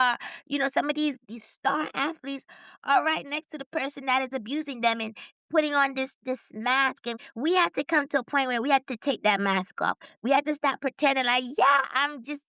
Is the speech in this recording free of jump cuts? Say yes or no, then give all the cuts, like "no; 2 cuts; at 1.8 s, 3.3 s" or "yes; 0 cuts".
no; 2 cuts; at 1.2 s, 7.2 s